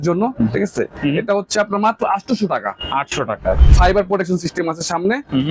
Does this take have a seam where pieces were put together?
yes; 2 cuts; at 0.9 s, 3.6 s

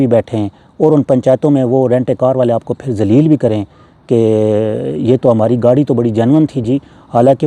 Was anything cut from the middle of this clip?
no; 0 cuts

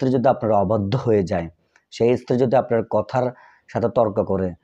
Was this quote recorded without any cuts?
yes; 0 cuts

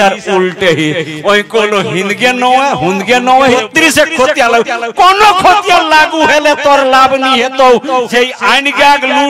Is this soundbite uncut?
no; 2 cuts; at 3.5 s, 8.1 s

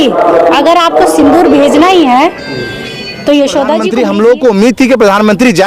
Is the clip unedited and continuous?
no; 1 cut; at 3.9 s

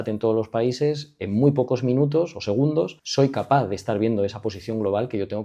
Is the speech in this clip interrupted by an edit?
yes; 1 cut; at 3.0 s

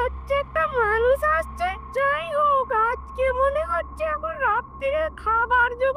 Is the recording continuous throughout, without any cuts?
yes; 0 cuts

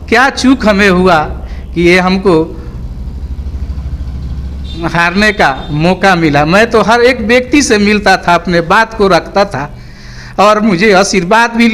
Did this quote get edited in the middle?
no; 0 cuts

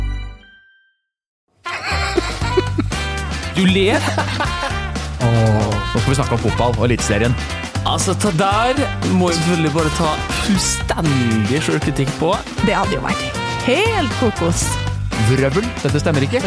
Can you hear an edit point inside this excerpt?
yes; 1 cut; at 1.4 s

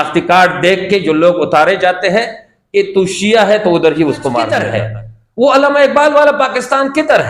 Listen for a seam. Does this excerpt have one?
yes; 1 cut; at 4.6 s

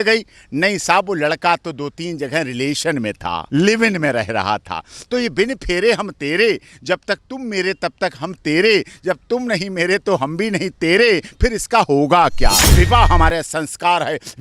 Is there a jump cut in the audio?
yes; 2 cuts; at 3.4 s, 12.7 s

